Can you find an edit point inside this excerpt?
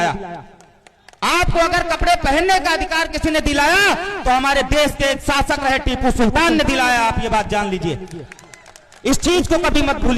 no; 0 cuts

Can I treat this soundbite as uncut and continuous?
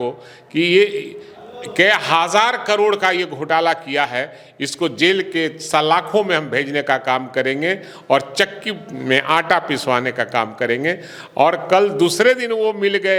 yes; 0 cuts

